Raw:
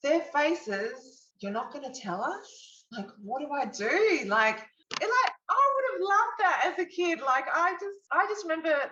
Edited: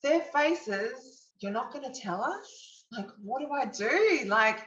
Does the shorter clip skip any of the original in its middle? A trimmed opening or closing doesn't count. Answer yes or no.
no